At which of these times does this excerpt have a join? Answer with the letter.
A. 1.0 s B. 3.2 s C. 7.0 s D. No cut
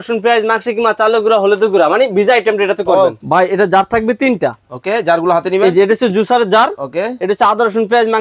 B